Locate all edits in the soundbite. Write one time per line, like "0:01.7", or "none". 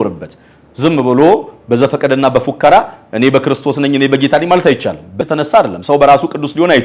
0:05.2